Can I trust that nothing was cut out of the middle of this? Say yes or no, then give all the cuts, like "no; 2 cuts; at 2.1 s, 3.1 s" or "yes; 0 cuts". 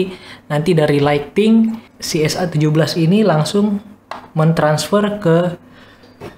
yes; 0 cuts